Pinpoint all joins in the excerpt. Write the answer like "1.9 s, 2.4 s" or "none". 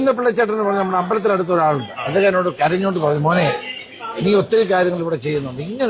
none